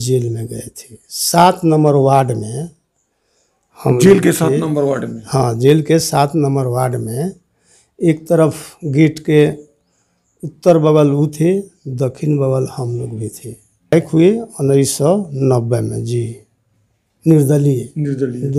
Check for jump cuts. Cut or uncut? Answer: cut